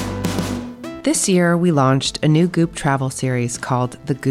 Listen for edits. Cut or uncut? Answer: cut